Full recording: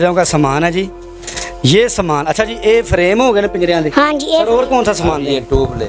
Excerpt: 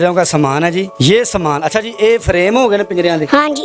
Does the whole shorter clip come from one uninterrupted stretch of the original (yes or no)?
no